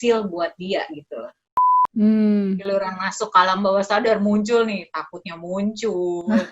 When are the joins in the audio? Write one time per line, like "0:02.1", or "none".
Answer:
0:01.7

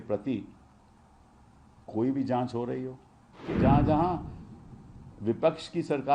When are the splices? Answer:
0:03.5

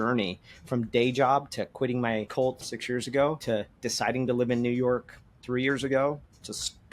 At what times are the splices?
0:02.7
0:03.4

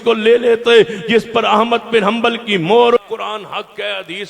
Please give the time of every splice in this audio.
0:03.0

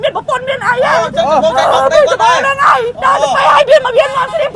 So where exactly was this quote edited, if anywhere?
0:02.9

